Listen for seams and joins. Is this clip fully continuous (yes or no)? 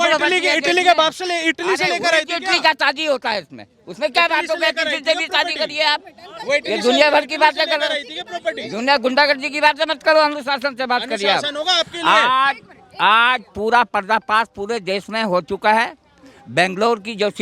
yes